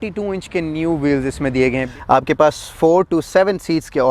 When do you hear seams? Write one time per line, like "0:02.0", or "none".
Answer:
0:01.8